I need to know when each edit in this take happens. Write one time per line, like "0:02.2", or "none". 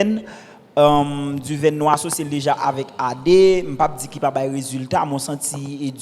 none